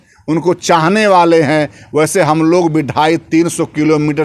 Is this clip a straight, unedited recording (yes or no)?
yes